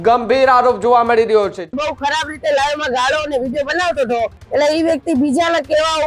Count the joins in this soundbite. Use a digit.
2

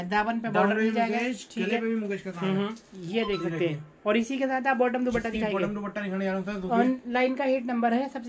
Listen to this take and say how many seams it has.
0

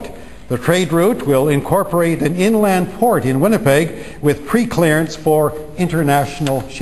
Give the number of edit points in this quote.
0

